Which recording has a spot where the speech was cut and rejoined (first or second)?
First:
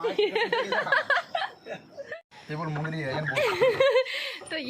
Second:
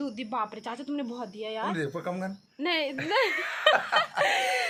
first